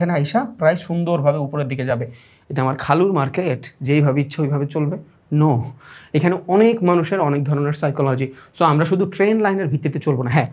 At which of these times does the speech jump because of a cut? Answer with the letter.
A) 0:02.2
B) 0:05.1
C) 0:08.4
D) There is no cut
D